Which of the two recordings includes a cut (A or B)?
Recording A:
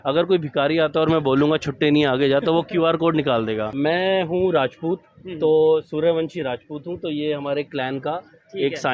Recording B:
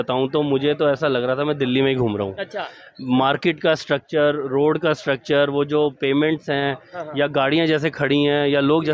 A